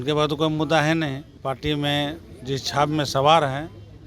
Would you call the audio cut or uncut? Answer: cut